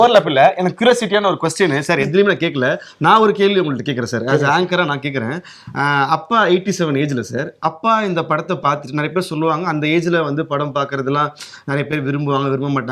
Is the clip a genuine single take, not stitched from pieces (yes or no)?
yes